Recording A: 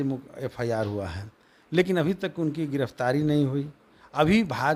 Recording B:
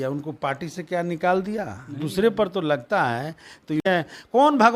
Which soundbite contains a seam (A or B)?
B